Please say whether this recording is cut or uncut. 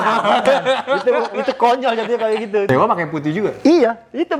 cut